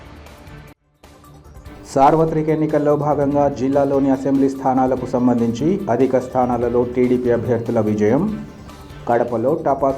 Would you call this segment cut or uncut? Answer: cut